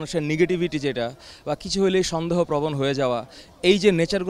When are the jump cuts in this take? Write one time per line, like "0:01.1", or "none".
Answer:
none

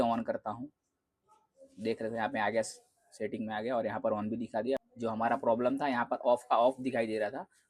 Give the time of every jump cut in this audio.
0:04.8

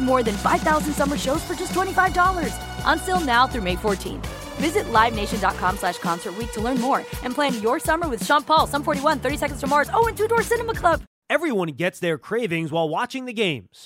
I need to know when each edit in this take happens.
0:11.1

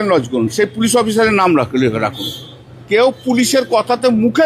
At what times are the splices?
0:02.8

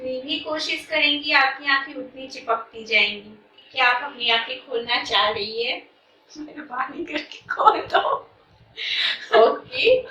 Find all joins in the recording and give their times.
0:03.6

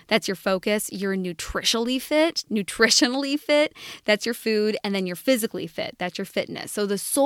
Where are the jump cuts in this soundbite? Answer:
none

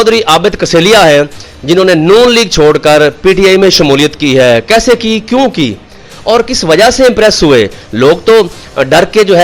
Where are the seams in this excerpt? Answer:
none

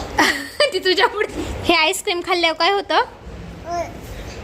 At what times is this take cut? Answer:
0:01.3

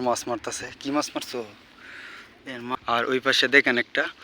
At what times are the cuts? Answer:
0:02.8

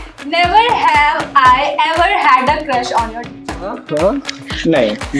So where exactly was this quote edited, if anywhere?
0:03.8

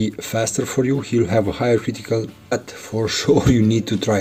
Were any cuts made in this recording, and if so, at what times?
0:02.5

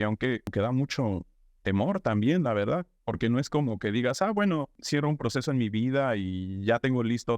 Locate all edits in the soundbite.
0:04.8

